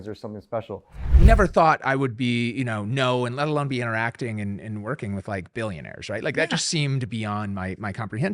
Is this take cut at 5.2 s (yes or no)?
no